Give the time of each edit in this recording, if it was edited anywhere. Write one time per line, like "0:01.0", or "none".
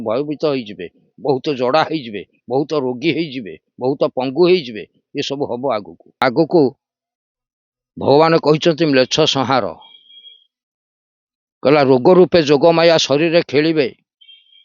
0:06.2